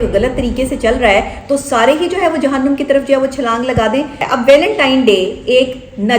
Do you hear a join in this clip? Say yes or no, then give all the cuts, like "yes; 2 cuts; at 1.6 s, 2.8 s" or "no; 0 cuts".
yes; 1 cut; at 4.2 s